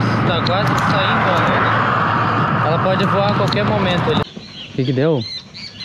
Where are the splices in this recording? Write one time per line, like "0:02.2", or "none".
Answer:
0:04.3